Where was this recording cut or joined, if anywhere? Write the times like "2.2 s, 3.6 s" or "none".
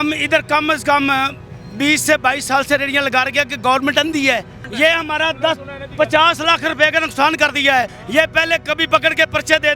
4.6 s, 8.0 s